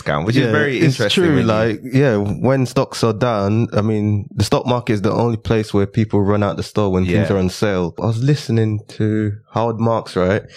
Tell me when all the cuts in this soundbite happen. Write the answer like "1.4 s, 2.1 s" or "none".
8.0 s